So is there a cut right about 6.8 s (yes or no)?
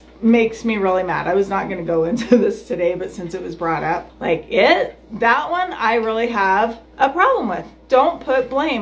yes